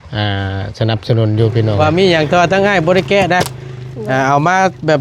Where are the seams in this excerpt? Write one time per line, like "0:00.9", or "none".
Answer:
0:01.7